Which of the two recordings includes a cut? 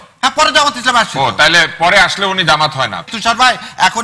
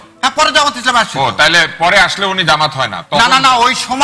first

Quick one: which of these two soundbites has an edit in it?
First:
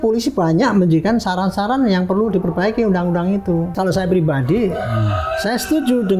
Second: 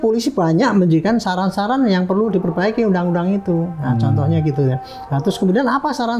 first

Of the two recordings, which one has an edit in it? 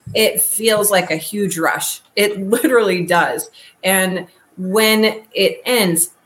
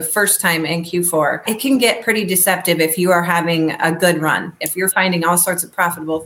second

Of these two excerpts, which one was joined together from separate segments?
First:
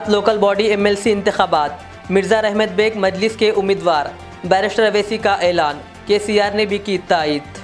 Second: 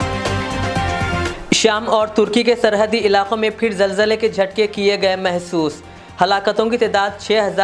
second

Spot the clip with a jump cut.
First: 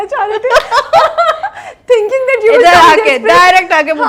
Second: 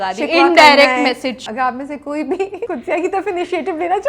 second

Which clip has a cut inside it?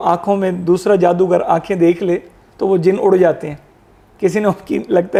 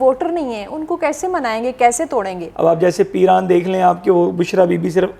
second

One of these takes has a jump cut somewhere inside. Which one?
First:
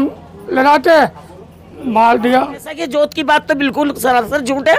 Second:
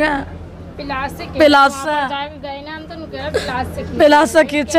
first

